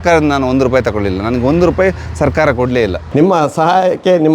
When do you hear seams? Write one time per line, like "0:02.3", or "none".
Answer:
0:03.0